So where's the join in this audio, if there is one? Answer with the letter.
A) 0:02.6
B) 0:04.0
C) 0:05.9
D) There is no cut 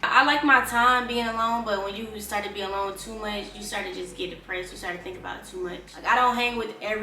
C